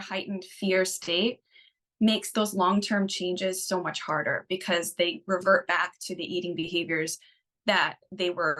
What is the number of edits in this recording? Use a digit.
0